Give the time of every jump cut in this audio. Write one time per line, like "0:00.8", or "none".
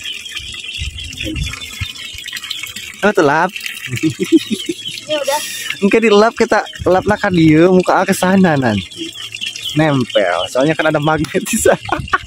none